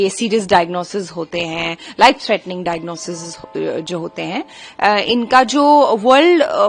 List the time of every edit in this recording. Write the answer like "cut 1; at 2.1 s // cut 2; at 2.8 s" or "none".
none